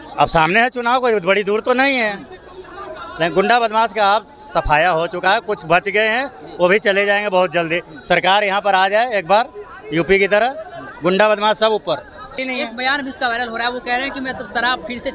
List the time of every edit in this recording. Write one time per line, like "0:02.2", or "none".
0:12.4